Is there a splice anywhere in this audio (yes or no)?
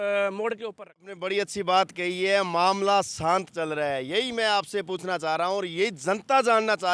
yes